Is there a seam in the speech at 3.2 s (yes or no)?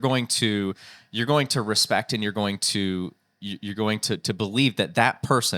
no